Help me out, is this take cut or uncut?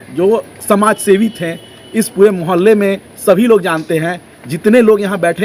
uncut